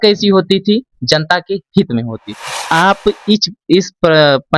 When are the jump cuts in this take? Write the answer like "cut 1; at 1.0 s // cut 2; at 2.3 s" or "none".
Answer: cut 1; at 2.5 s